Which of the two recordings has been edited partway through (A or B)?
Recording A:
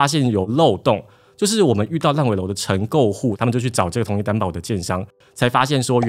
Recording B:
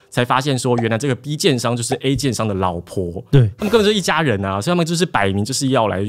A